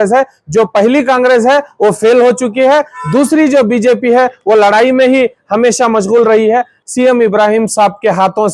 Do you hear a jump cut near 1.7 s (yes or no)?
no